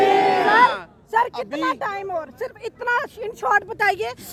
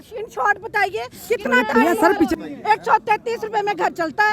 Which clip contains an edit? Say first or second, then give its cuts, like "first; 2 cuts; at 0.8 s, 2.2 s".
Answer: second; 1 cut; at 2.4 s